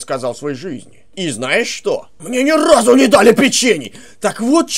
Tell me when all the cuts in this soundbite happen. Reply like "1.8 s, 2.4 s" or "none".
1.1 s, 2.1 s